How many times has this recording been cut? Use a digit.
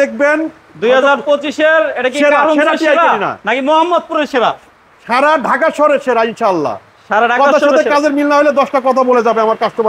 0